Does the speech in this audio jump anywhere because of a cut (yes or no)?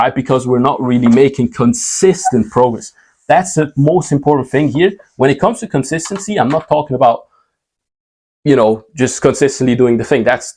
no